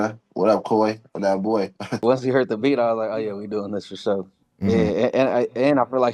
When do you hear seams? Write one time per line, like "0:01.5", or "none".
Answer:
0:02.0